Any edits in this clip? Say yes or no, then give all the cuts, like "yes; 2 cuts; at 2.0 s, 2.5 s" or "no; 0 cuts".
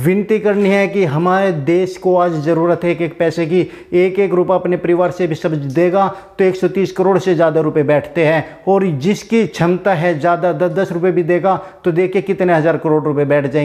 no; 0 cuts